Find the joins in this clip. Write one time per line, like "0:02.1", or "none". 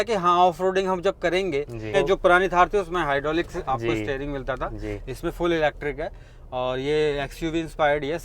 0:01.9